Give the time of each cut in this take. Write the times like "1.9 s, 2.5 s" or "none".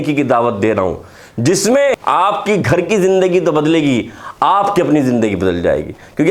2.0 s

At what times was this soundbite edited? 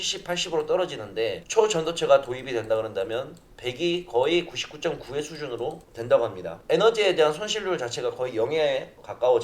none

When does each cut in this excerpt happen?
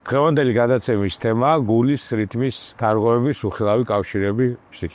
2.6 s

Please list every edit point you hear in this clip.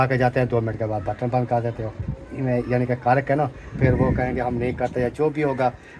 none

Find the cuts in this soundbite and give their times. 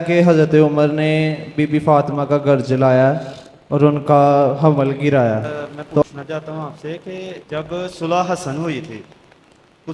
6.0 s

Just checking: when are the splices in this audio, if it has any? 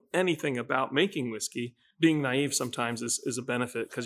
1.8 s

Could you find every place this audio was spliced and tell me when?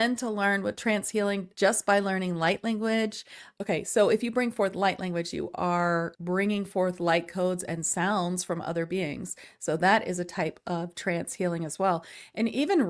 none

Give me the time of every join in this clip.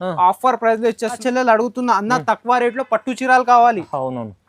1.2 s

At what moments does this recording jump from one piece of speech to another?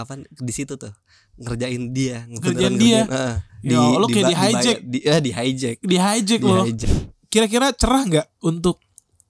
6.8 s

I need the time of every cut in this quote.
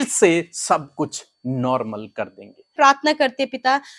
2.7 s

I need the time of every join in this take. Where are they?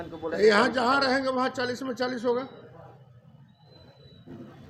none

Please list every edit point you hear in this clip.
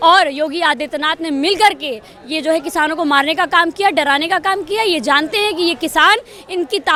none

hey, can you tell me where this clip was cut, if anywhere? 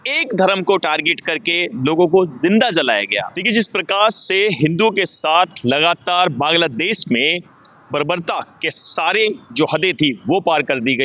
3.3 s

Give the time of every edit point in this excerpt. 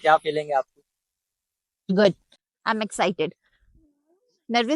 none

